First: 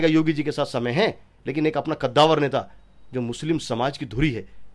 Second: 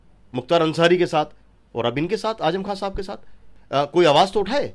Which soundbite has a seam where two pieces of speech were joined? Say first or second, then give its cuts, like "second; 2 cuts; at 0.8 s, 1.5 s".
second; 1 cut; at 3.5 s